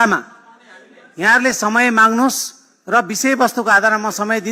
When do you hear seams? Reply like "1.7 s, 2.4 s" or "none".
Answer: none